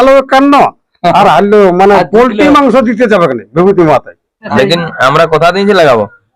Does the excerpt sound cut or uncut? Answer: cut